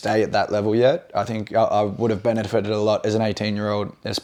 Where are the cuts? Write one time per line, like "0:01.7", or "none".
none